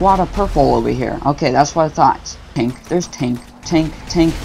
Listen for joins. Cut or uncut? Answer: cut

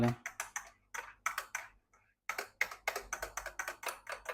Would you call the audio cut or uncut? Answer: uncut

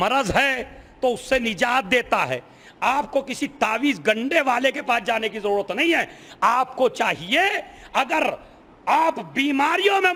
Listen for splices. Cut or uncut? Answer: uncut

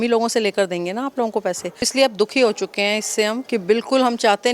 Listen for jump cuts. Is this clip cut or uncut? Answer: cut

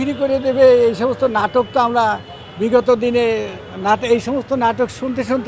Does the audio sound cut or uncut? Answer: uncut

